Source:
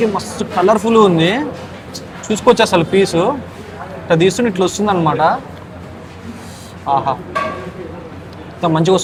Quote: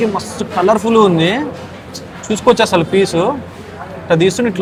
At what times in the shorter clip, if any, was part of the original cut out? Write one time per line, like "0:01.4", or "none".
none